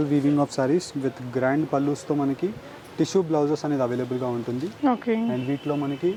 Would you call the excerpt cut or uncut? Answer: uncut